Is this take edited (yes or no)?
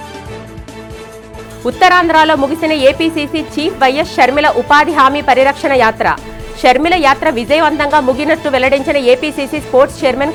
no